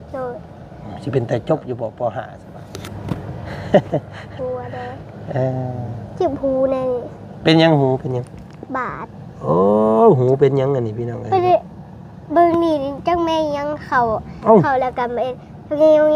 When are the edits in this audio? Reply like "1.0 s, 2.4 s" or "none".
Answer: 2.4 s